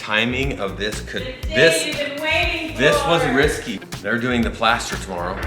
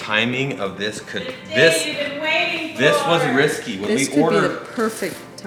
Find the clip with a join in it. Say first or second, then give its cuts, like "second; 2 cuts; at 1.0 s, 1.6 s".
first; 1 cut; at 3.7 s